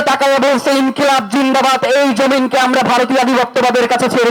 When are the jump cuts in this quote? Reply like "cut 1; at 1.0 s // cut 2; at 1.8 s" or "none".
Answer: none